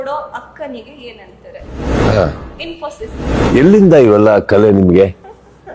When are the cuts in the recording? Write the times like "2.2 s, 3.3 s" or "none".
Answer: none